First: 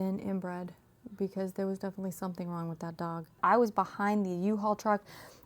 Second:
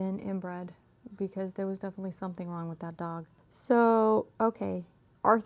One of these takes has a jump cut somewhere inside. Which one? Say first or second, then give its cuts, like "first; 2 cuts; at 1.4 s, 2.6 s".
first; 1 cut; at 3.4 s